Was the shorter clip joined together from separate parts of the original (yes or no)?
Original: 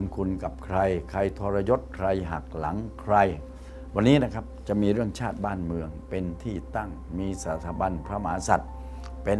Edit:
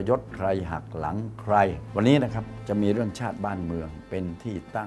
yes